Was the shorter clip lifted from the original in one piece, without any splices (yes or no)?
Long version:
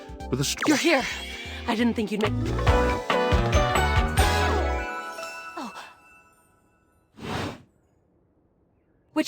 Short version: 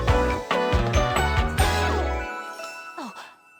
yes